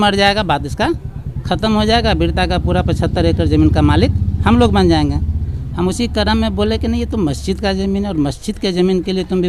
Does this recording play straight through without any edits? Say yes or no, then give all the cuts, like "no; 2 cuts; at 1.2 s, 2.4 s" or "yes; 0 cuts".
yes; 0 cuts